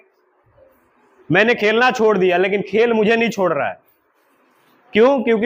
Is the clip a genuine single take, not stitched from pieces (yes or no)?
yes